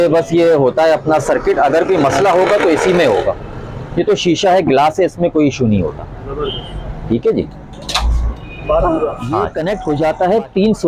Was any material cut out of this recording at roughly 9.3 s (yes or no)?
yes